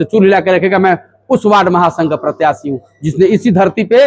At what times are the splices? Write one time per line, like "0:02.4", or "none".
none